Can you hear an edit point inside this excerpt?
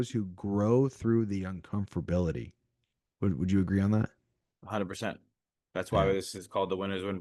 no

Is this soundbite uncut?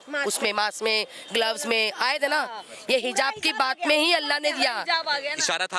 yes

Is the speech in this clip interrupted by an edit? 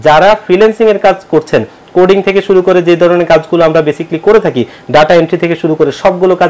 no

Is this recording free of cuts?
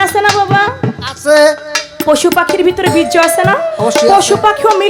yes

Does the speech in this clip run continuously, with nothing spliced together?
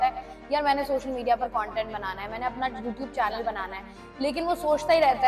yes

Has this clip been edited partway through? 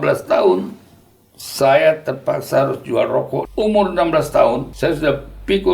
yes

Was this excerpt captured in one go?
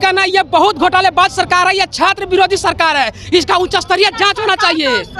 yes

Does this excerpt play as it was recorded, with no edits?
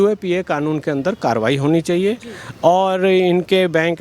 yes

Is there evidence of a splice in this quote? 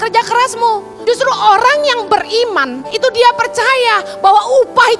yes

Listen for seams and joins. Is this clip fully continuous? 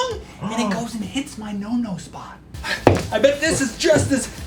yes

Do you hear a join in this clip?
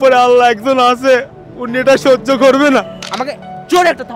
yes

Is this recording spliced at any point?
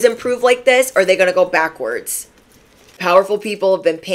yes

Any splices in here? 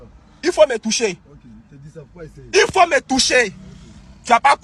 no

